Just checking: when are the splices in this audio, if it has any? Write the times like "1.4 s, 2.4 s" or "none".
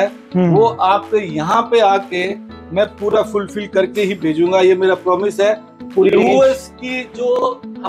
5.7 s